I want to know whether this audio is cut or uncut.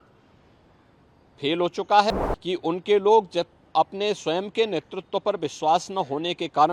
cut